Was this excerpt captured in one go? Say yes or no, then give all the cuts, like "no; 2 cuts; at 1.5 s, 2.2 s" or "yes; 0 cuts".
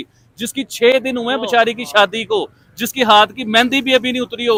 yes; 0 cuts